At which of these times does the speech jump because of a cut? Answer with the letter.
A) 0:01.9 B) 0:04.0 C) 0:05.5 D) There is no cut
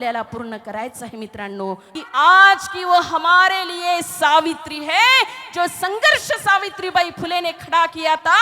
A